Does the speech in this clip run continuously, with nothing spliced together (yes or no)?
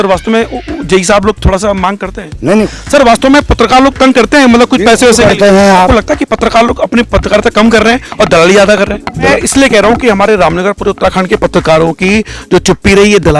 no